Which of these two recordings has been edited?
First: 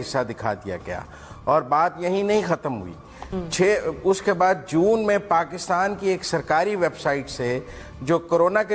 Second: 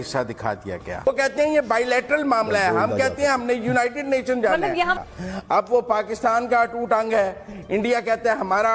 second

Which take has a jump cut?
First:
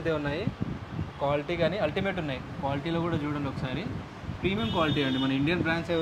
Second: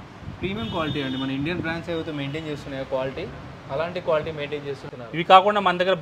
second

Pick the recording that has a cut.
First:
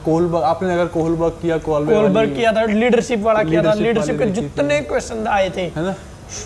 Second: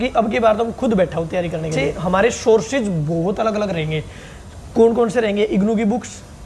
second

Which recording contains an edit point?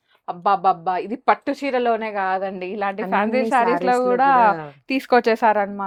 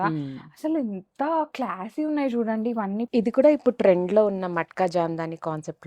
second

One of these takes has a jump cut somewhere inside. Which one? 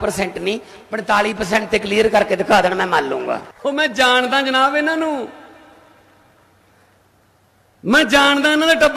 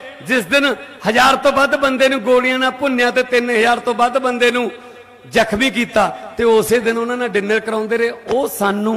first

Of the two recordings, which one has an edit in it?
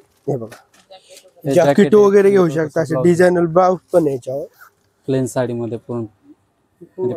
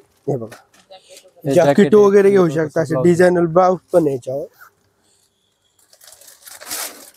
first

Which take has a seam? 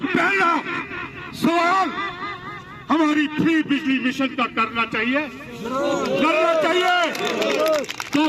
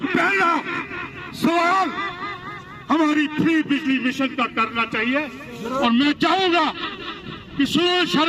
second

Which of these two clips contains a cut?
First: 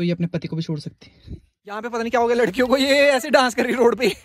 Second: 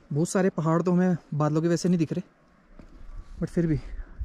first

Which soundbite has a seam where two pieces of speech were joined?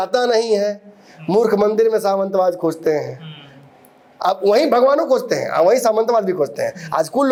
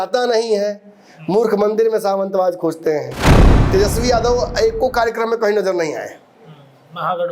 second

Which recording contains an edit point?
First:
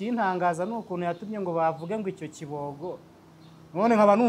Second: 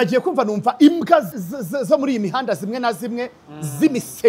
second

